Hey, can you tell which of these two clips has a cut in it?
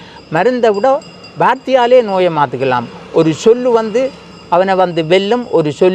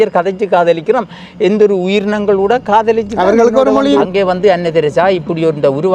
second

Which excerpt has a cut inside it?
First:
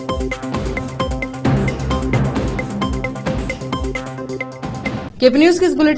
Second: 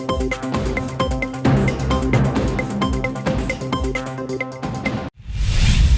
second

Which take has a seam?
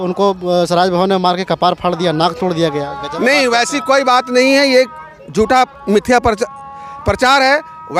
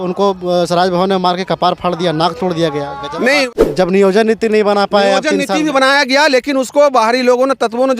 second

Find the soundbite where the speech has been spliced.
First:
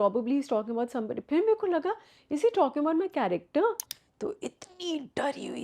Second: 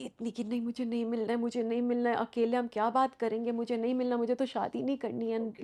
first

